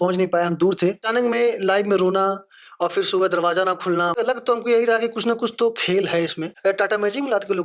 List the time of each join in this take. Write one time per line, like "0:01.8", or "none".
0:01.0
0:04.2
0:06.4